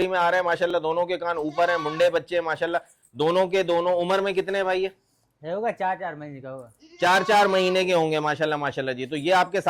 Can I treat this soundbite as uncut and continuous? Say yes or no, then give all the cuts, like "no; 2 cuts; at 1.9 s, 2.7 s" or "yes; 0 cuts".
yes; 0 cuts